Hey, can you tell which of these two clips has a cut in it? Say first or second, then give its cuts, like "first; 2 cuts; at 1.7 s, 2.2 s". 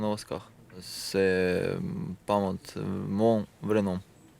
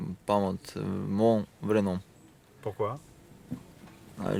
first; 1 cut; at 0.9 s